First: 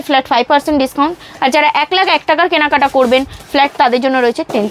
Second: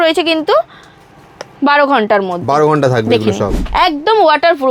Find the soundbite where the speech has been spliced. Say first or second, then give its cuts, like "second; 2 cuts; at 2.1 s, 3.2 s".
second; 1 cut; at 3.6 s